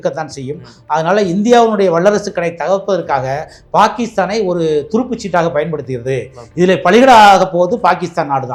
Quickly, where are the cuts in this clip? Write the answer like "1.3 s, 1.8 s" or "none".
none